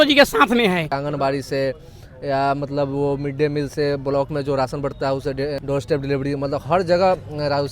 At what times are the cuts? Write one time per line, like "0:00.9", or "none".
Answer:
0:01.0
0:05.6